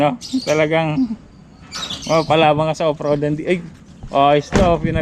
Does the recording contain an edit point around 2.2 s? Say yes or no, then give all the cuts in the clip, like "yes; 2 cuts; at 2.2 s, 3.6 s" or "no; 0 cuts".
no; 0 cuts